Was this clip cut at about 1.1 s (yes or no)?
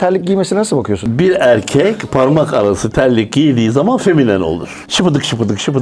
yes